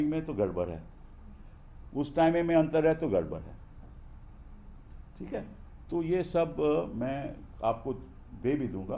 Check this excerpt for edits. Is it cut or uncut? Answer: uncut